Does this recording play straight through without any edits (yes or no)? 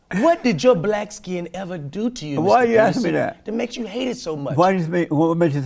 yes